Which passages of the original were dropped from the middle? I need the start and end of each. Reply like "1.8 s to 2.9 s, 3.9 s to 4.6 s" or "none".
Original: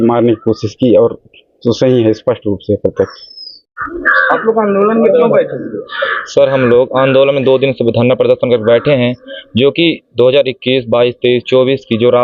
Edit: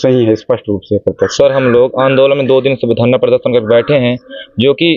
3.1 s to 6.3 s